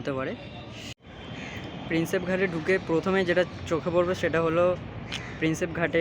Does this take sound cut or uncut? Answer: cut